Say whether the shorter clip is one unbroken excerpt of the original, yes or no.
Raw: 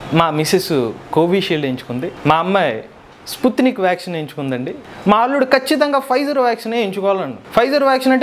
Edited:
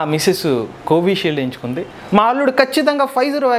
no